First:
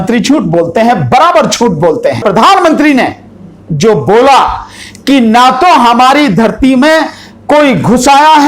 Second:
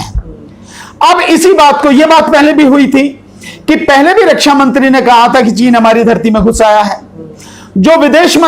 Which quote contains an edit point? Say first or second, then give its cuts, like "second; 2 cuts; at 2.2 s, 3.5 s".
first; 1 cut; at 2.2 s